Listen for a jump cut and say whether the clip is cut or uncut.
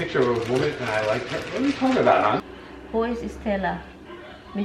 cut